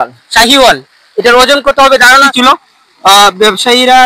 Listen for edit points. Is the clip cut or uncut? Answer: cut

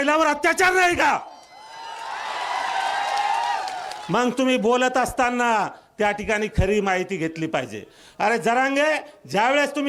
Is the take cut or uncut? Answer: uncut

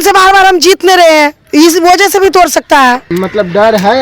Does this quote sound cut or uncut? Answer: cut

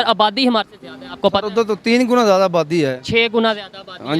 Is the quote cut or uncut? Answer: uncut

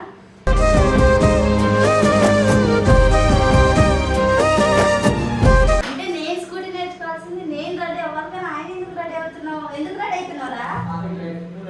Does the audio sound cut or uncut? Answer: cut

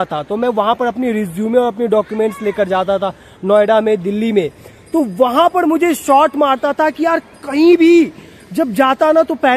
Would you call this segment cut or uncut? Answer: uncut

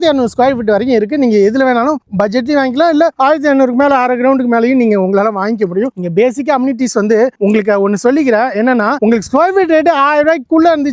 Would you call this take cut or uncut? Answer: uncut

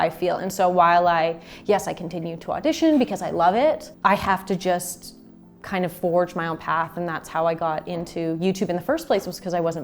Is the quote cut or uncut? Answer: cut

